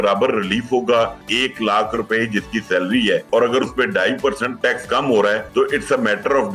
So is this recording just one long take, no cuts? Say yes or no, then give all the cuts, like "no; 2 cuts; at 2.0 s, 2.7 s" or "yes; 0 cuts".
no; 4 cuts; at 1.3 s, 3.2 s, 4.5 s, 5.4 s